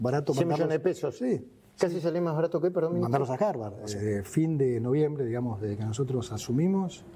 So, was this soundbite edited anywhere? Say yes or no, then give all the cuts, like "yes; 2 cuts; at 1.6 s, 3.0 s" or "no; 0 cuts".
yes; 1 cut; at 3.9 s